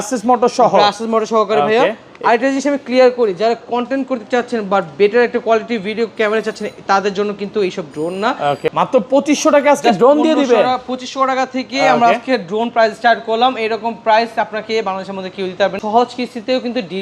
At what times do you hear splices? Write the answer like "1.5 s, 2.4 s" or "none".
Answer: 8.7 s, 15.8 s